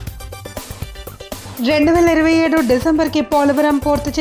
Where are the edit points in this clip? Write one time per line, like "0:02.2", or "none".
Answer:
0:00.9